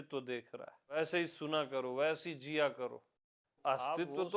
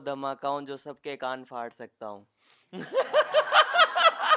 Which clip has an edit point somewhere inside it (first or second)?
first